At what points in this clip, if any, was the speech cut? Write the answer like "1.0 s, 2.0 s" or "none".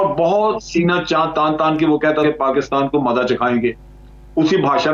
2.2 s